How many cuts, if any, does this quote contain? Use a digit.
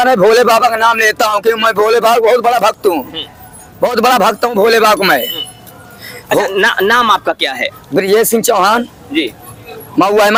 0